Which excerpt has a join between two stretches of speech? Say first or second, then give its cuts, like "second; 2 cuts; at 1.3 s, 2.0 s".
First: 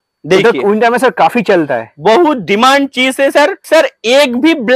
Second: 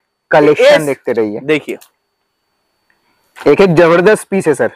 first; 1 cut; at 3.6 s